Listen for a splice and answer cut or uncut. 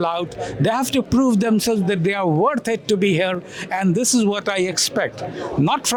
uncut